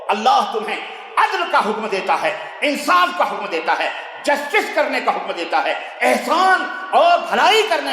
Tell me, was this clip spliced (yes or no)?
no